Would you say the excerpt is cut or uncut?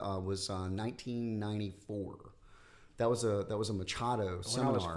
uncut